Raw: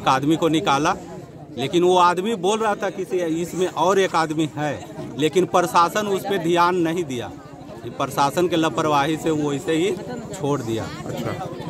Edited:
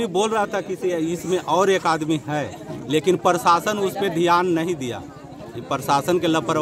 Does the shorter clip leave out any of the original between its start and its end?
no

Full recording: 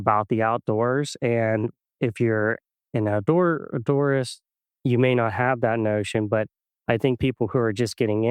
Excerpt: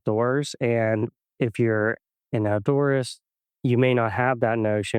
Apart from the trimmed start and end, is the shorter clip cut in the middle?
yes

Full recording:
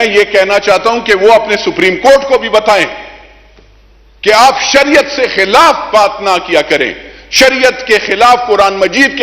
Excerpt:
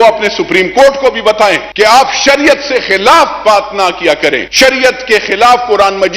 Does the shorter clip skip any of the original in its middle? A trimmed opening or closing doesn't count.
yes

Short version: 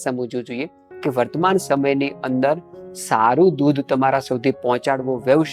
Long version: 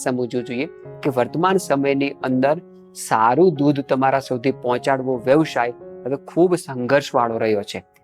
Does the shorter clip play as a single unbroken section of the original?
yes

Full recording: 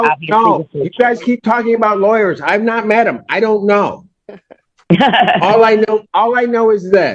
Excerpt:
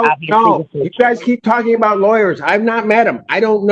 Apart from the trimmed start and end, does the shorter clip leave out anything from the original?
no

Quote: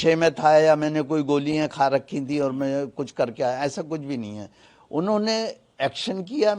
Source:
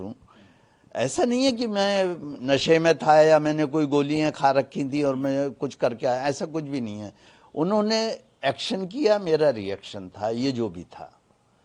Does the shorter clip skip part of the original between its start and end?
no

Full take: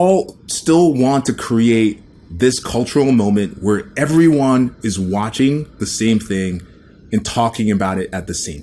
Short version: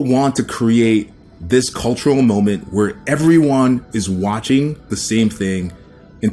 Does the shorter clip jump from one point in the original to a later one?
no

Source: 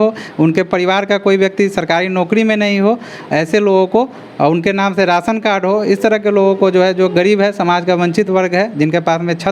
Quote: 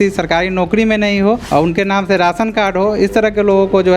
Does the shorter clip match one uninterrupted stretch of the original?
no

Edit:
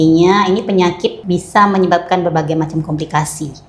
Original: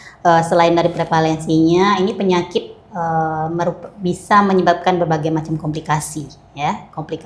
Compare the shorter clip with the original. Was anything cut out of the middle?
yes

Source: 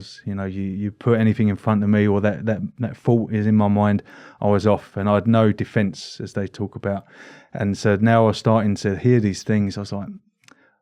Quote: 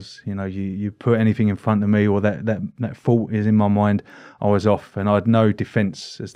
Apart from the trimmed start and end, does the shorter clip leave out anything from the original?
no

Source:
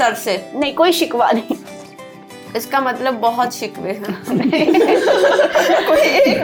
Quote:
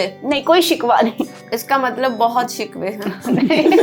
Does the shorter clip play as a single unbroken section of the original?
no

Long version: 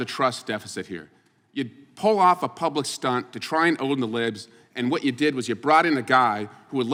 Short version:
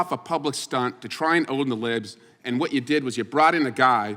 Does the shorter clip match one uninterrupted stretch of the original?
yes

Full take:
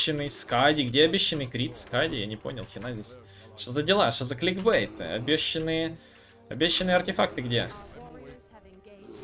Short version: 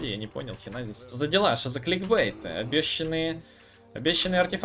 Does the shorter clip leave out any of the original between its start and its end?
yes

